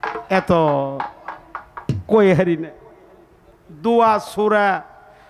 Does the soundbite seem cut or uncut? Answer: uncut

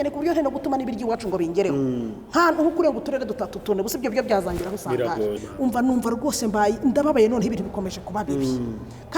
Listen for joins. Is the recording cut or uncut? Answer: cut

